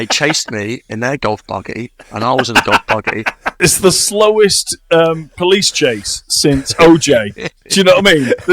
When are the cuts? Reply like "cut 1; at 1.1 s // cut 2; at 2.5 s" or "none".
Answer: cut 1; at 3.6 s